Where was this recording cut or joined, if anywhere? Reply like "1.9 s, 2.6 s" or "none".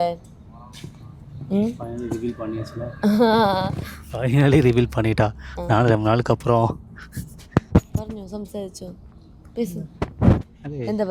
none

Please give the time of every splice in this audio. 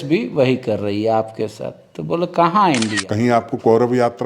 3.0 s

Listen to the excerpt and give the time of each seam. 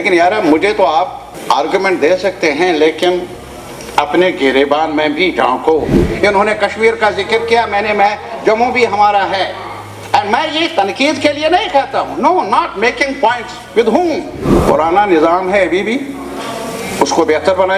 1.3 s, 6.0 s, 14.6 s

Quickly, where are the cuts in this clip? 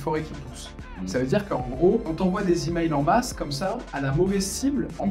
2.1 s

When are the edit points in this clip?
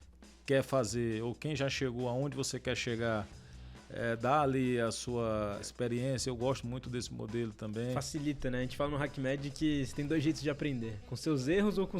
5.6 s

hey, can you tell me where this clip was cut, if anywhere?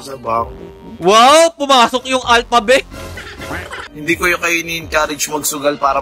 3.8 s

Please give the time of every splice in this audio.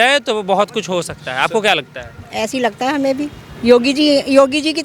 none

